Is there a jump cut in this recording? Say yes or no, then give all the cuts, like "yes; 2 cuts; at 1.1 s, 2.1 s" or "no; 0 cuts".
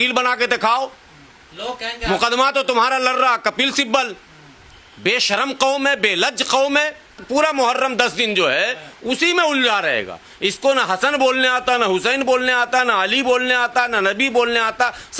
yes; 1 cut; at 7.2 s